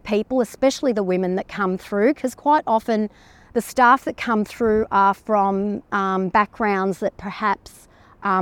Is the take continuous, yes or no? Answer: yes